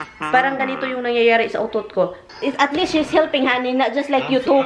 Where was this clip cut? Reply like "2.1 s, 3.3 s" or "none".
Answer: 2.3 s